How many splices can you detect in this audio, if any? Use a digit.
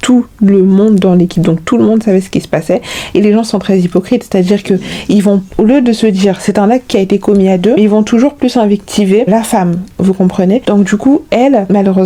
0